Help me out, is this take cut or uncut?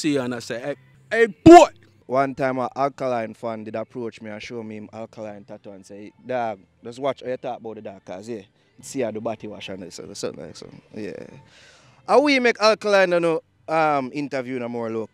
cut